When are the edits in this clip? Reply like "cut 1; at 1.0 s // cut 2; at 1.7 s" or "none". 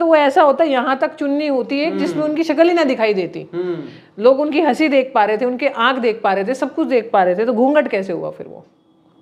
none